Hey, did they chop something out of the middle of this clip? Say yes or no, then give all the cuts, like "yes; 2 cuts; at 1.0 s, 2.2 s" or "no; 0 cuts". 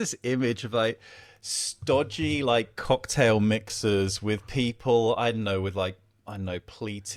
no; 0 cuts